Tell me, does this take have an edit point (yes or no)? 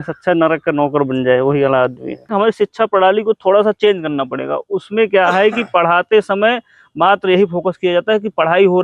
yes